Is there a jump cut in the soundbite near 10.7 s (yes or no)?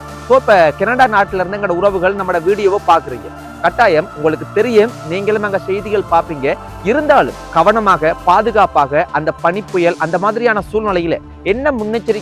no